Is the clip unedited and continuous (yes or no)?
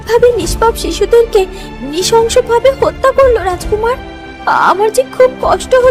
yes